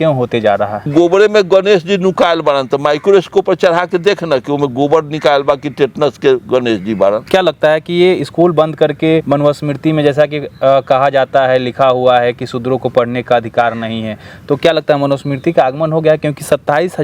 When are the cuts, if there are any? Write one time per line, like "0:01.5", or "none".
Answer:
0:00.9
0:07.2
0:09.2